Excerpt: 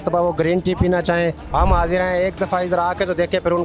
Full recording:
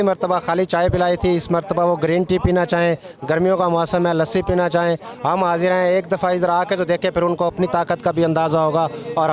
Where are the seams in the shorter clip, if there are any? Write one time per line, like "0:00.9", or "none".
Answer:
0:01.4

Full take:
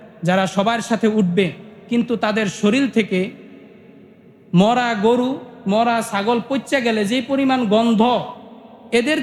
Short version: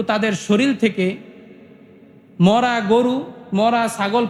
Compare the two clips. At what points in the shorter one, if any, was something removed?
none

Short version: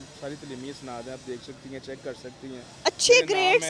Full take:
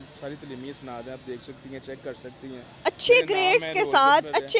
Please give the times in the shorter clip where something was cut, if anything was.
none

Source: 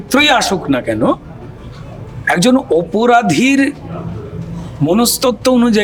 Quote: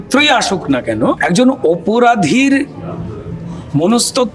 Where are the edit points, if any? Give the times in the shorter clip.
0:01.2

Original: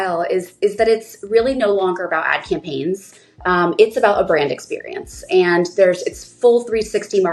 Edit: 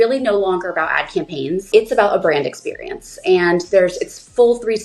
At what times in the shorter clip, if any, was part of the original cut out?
0:01.7

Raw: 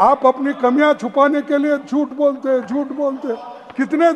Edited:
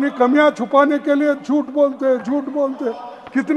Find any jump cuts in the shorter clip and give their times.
none

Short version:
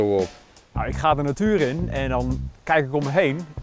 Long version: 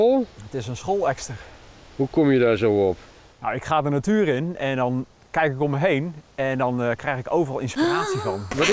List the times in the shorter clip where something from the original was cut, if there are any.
none

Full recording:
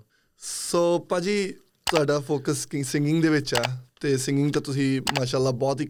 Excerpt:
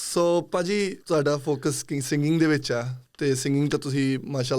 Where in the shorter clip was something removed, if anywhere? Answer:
0:01.0

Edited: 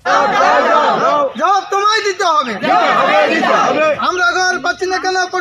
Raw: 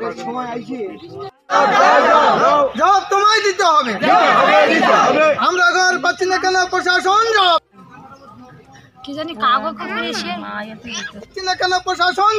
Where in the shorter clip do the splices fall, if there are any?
none

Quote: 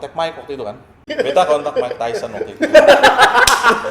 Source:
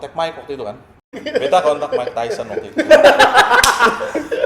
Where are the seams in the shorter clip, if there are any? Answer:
0:00.9

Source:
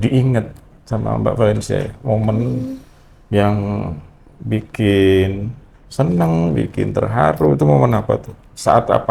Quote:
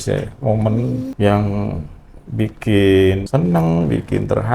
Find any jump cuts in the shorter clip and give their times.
0:01.1
0:03.2

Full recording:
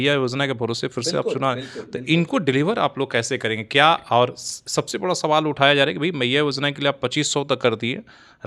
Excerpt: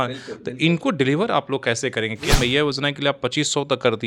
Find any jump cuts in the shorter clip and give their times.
0:02.2

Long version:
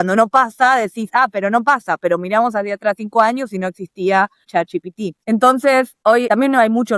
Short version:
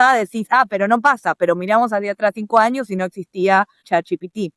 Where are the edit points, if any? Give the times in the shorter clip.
none

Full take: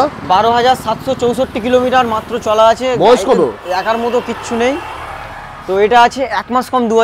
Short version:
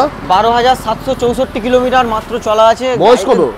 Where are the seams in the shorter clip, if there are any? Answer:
none

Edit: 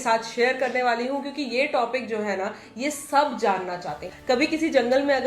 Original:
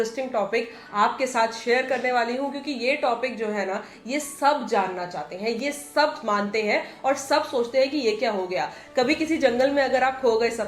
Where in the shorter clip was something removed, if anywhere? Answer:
0:04.1

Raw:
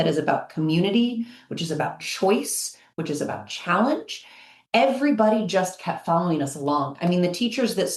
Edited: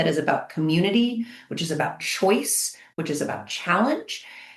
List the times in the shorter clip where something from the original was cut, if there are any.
none

